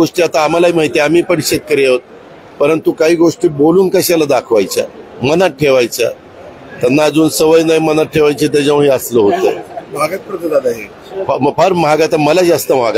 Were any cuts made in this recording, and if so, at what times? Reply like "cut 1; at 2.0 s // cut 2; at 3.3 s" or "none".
none